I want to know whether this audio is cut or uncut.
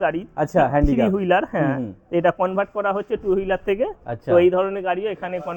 uncut